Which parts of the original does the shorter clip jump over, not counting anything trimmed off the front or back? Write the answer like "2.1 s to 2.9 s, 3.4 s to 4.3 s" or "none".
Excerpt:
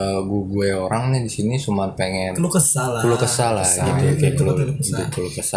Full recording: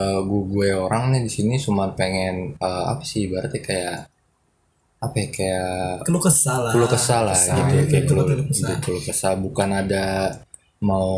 2.3 s to 6.0 s